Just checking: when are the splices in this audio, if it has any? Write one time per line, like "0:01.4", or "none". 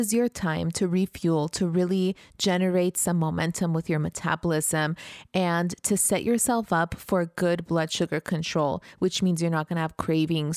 none